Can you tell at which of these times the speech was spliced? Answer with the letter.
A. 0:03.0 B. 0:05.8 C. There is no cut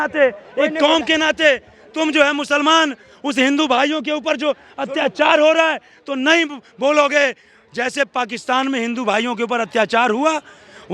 C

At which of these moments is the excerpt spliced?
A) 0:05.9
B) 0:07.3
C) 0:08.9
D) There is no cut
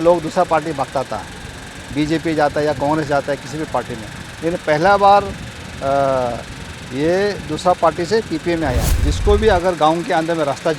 C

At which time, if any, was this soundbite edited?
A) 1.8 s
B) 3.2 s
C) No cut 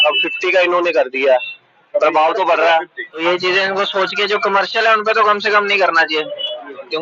B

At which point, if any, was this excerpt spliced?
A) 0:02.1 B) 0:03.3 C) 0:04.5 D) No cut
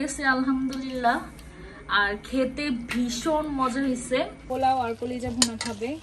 C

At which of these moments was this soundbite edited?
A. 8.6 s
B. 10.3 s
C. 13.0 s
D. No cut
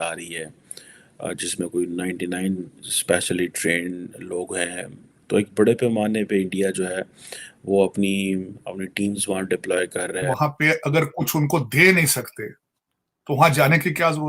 B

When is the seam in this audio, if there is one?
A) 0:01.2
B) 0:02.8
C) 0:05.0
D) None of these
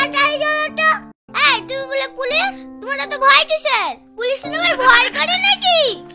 A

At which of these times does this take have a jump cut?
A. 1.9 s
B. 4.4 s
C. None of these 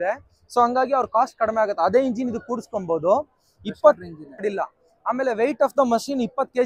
B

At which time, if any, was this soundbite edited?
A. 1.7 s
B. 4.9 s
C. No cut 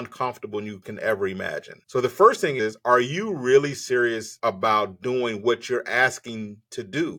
A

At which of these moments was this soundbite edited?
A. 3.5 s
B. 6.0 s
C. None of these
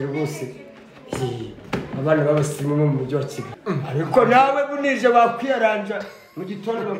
A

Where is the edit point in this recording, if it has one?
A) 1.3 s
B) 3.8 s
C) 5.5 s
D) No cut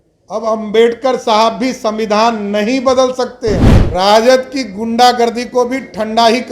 B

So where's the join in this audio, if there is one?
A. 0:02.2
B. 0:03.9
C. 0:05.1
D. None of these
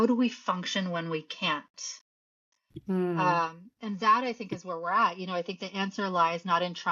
D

